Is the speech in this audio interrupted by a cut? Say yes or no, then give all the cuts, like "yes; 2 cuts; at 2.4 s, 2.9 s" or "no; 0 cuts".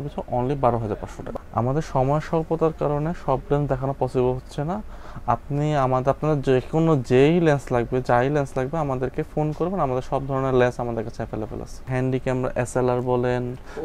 no; 0 cuts